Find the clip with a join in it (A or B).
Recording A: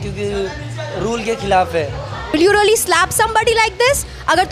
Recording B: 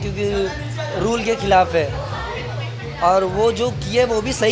A